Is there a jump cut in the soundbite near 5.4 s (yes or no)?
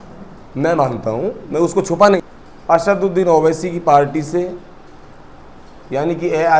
no